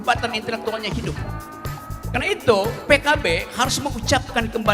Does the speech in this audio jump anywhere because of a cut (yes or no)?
no